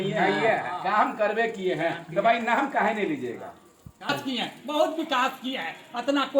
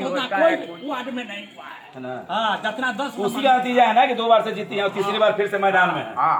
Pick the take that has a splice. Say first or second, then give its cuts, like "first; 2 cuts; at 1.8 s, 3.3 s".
first; 1 cut; at 4.1 s